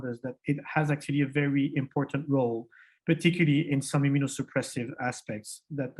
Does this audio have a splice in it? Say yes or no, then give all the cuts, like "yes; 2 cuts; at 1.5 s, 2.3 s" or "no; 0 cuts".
no; 0 cuts